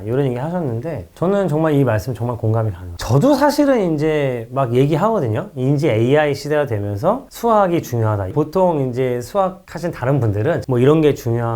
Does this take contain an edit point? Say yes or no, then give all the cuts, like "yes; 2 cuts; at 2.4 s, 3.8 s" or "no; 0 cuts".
yes; 3 cuts; at 2.9 s, 8.2 s, 10.6 s